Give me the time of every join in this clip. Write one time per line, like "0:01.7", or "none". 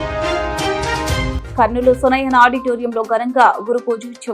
0:01.4